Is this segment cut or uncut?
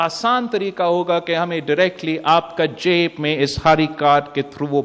uncut